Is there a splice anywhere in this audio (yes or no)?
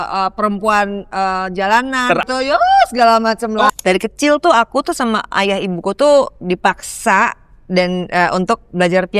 yes